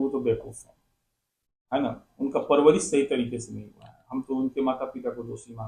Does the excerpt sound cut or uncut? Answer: uncut